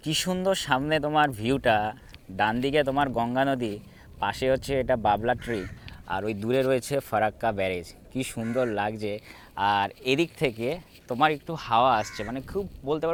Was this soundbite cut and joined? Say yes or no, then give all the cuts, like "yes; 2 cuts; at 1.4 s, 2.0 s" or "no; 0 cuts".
no; 0 cuts